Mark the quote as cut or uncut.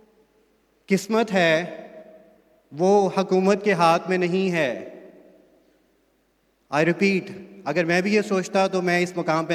uncut